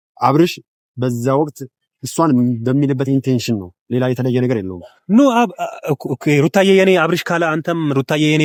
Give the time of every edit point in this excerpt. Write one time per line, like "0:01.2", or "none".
none